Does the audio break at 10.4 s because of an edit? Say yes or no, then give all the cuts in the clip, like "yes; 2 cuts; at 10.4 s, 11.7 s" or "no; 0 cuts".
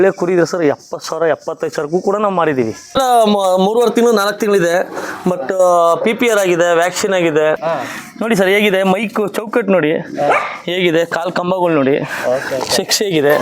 no; 2 cuts; at 2.9 s, 7.6 s